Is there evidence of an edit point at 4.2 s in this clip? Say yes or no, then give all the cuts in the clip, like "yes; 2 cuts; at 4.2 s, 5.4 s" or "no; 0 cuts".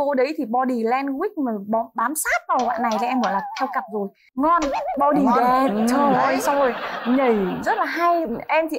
yes; 1 cut; at 4.2 s